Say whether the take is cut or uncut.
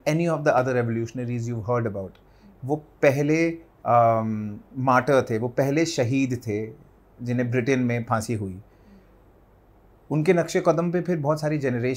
uncut